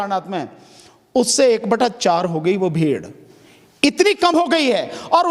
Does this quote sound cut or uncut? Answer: uncut